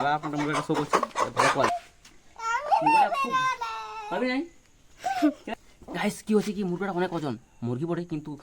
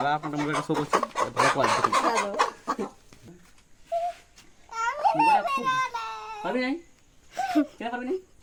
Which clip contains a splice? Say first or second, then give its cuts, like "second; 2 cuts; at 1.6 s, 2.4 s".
first; 2 cuts; at 1.7 s, 5.5 s